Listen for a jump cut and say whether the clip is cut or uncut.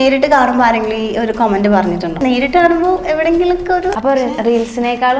cut